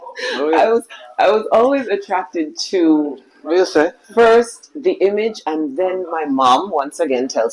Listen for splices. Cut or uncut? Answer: uncut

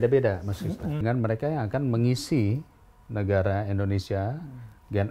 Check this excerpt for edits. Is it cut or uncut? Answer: cut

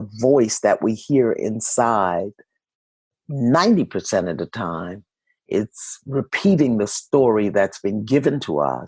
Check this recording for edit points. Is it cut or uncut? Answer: uncut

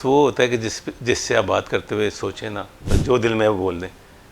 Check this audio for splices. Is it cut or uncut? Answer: cut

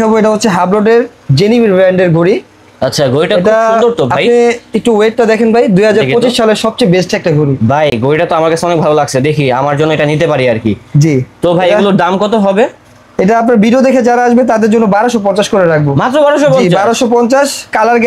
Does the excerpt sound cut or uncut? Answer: uncut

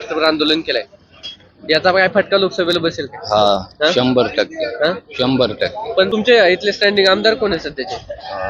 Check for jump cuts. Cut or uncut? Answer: cut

